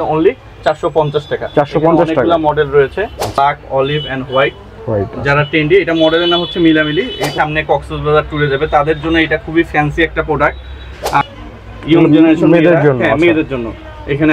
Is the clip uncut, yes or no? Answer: no